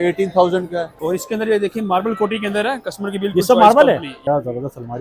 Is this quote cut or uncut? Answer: cut